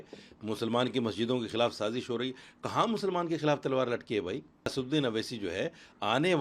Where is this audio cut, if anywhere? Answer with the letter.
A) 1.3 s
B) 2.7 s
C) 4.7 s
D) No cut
C